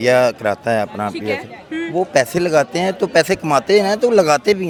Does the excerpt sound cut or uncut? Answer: uncut